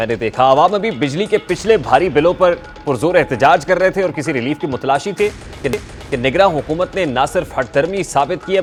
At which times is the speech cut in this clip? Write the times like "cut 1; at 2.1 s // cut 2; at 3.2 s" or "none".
none

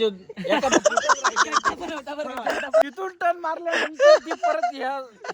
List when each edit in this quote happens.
cut 1; at 2.8 s

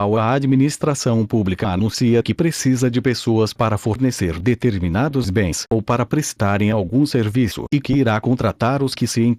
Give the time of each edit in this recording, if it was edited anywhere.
none

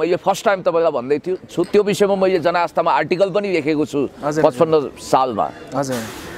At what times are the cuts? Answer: none

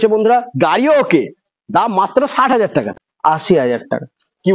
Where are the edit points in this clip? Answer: cut 1; at 2.9 s

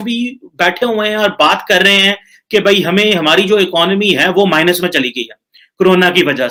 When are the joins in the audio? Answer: none

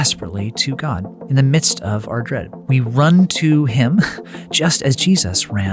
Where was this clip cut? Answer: cut 1; at 1.1 s // cut 2; at 2.5 s

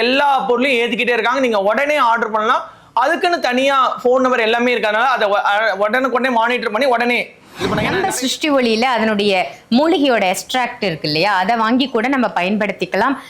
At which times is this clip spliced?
cut 1; at 7.8 s

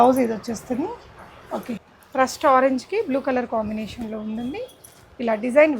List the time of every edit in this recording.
cut 1; at 1.8 s

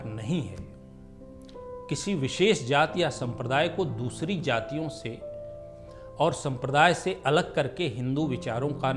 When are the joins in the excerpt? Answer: none

